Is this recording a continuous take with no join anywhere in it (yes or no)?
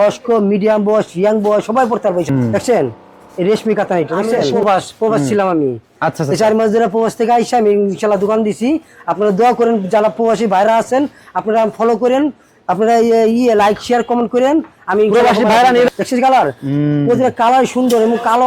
no